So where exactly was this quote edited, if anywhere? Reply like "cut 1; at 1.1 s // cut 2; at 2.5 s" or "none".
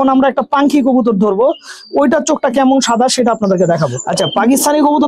cut 1; at 4.0 s